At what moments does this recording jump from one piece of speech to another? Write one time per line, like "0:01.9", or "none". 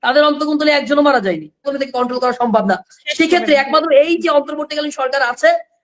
0:01.7

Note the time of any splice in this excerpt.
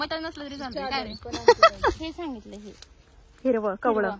0:02.0

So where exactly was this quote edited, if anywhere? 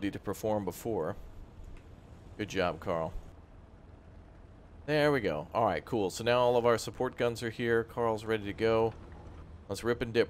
0:03.3

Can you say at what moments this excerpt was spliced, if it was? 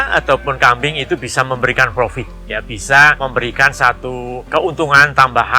0:03.2
0:04.4

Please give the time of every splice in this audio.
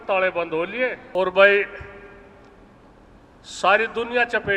0:01.0

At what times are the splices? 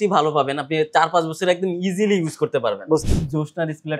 0:03.0

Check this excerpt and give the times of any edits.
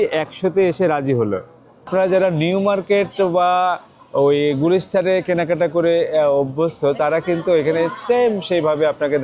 0:01.9

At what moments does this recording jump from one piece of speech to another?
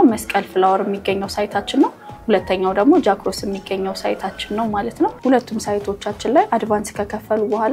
0:05.2

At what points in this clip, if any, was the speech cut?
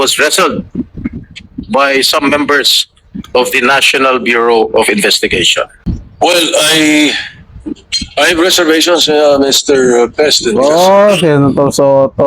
0:05.8

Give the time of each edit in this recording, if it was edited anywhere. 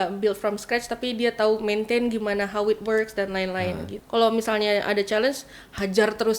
0:03.9

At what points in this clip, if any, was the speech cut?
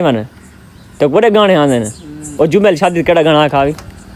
none

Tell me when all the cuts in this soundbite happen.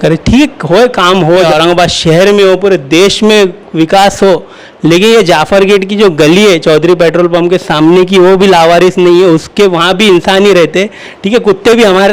0:01.5

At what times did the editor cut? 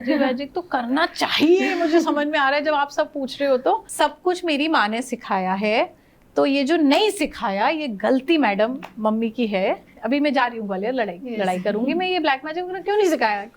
0:03.9

